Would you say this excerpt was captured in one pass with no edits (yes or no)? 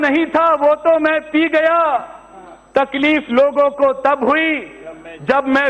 yes